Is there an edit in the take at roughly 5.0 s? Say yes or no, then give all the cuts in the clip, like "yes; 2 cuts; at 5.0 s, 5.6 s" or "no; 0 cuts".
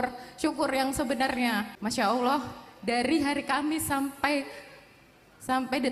no; 1 cut; at 1.7 s